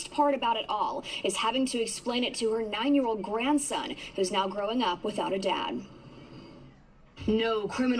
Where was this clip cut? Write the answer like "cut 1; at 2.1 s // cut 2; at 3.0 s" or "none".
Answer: cut 1; at 4.5 s